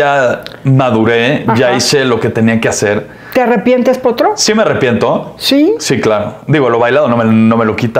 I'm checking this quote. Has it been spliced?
no; 0 cuts

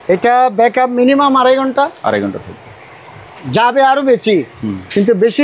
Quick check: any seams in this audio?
no; 0 cuts

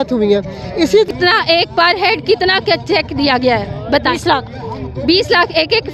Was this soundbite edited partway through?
yes; 1 cut; at 1.1 s

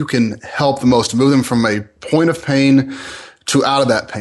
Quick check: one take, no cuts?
yes; 0 cuts

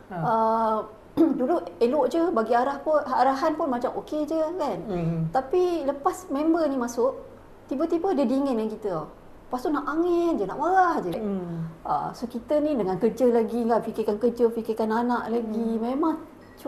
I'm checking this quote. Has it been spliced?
yes; 1 cut; at 11.1 s

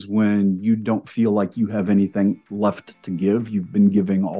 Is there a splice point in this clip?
no; 0 cuts

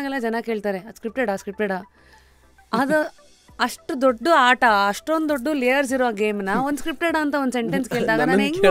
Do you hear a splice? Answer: no; 0 cuts

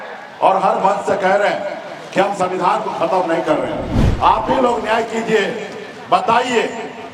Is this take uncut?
yes; 0 cuts

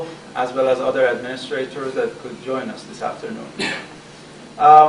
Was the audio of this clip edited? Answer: no; 0 cuts

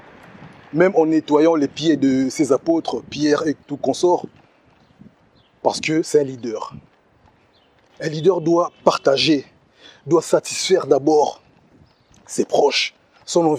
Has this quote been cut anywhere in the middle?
no; 0 cuts

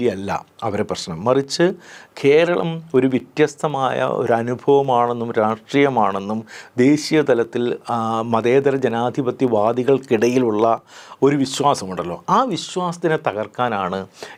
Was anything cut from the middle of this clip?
no; 0 cuts

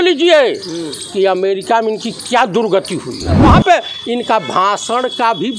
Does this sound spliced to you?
yes; 1 cut; at 3.4 s

